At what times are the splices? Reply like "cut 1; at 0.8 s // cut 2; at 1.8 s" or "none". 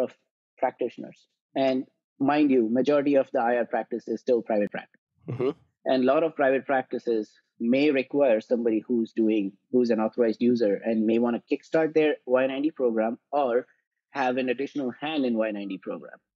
none